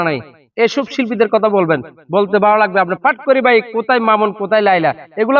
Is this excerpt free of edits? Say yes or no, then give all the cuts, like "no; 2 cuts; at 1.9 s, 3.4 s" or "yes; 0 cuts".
yes; 0 cuts